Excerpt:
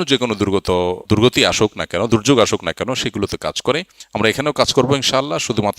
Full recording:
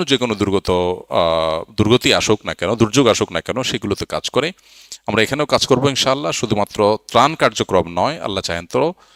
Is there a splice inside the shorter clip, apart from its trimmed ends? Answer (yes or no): yes